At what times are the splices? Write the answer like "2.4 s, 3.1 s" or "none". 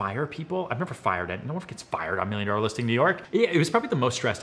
3.2 s

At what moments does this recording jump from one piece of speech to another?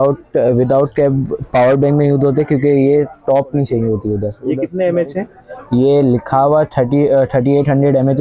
4.3 s

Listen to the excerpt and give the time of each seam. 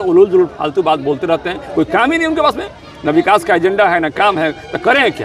none

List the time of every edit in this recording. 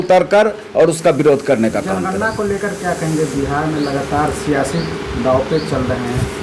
none

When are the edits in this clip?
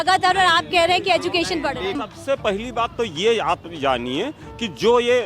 2.0 s

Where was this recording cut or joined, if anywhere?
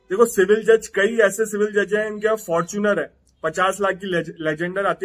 none

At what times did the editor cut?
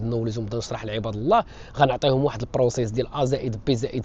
none

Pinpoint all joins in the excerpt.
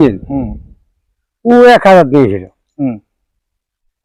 none

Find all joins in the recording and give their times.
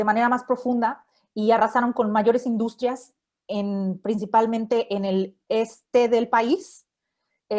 none

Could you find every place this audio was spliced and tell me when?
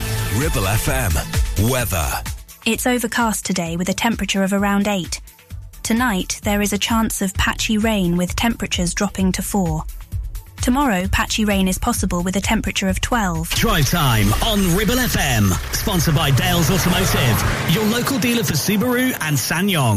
13.5 s

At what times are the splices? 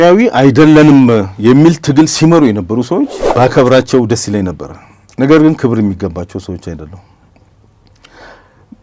3.2 s

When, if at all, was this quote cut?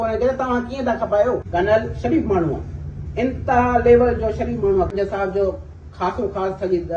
1.4 s, 4.9 s

